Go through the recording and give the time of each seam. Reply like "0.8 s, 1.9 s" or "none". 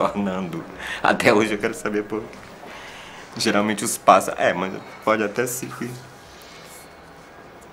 3.4 s

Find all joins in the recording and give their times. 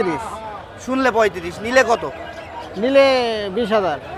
none

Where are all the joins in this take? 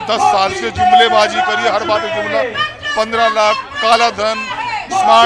none

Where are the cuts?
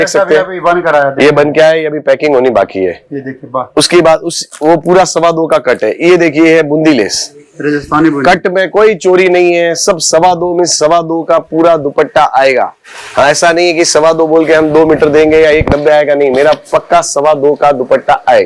none

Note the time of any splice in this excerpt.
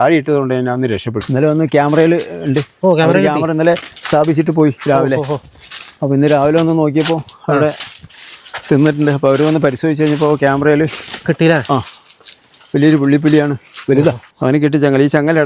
1.2 s, 14.3 s

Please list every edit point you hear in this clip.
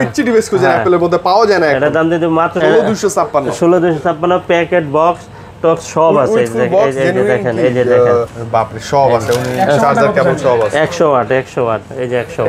2.6 s, 8.4 s

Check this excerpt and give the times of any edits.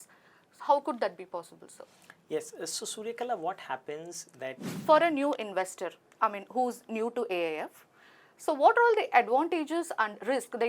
4.7 s

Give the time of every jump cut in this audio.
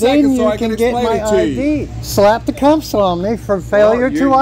2.0 s

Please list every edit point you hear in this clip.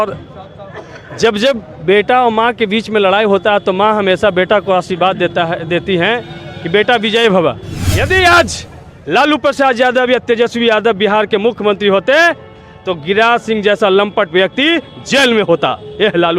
7.7 s

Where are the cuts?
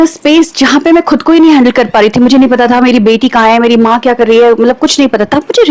none

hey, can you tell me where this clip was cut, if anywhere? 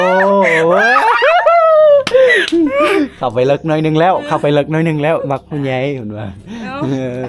none

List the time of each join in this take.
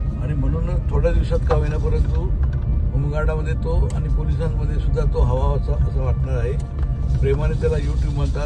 none

